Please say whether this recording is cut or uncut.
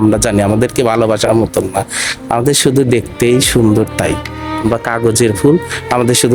cut